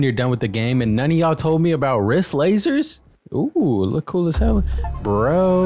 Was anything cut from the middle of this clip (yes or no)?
yes